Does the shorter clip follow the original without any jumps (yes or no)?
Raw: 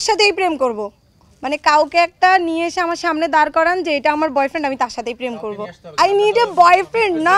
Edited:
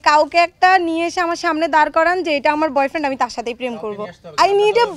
yes